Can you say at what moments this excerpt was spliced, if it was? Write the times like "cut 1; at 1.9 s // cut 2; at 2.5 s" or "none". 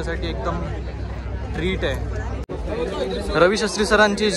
cut 1; at 2.5 s